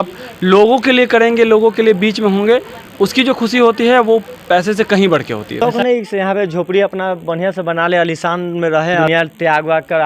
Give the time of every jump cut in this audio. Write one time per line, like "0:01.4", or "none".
0:05.6
0:09.1